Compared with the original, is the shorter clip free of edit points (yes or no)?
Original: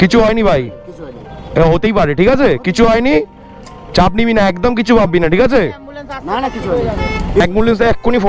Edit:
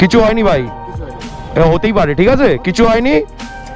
yes